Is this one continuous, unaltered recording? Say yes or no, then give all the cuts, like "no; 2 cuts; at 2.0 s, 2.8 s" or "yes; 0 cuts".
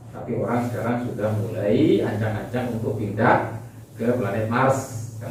yes; 0 cuts